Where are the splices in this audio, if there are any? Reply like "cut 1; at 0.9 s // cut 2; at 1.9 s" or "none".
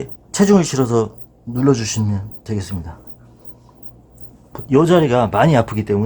none

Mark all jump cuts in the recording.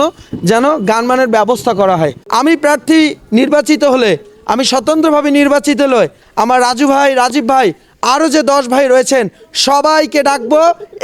cut 1; at 2.2 s

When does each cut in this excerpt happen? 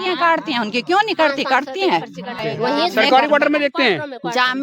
cut 1; at 2.5 s

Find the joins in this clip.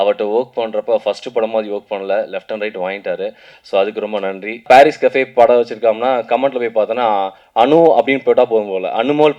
cut 1; at 4.6 s

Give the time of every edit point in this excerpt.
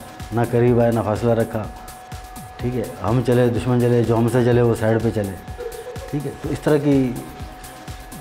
none

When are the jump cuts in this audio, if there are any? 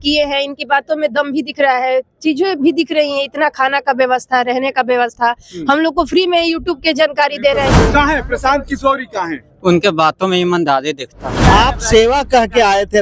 cut 1; at 7.8 s // cut 2; at 11.4 s

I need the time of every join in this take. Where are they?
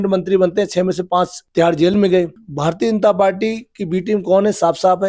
cut 1; at 1.4 s // cut 2; at 2.4 s

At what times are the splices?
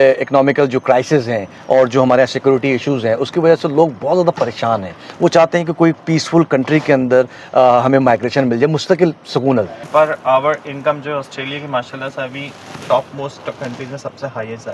cut 1; at 9.8 s

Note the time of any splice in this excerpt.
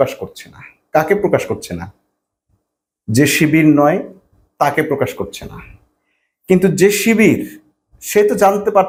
none

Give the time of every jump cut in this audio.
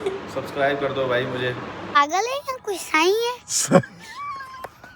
cut 1; at 1.8 s

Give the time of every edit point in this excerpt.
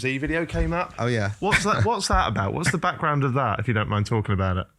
none

